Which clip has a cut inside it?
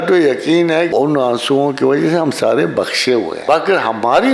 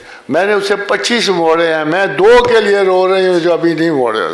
first; 2 cuts; at 0.9 s, 3.3 s

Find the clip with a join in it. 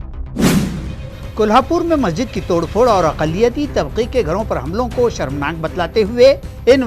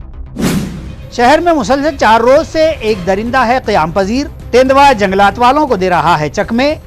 second; 1 cut; at 0.9 s

